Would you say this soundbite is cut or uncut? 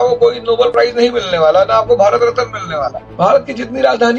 cut